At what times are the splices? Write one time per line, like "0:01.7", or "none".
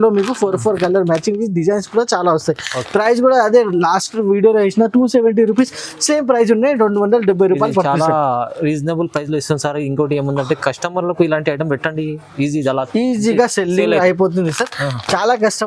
none

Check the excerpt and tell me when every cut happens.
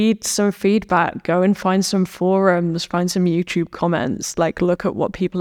none

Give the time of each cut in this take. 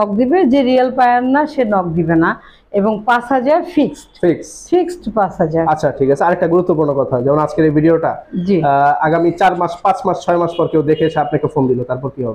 none

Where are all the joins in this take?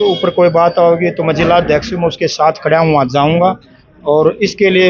none

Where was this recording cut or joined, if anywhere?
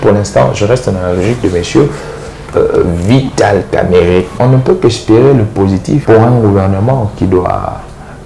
0:04.3
0:06.0

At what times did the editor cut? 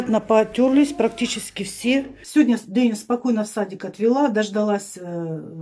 0:02.2

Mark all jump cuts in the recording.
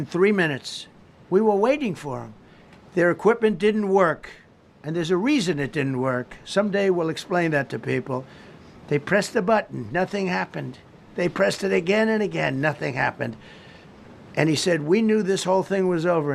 none

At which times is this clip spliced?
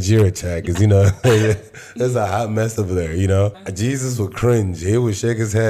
0:03.6

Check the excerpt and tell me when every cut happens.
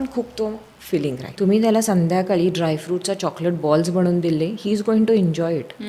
0:01.3

